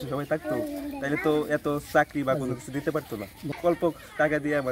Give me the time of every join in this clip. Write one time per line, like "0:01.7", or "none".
0:03.6